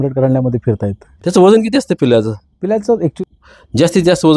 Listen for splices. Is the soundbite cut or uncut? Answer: cut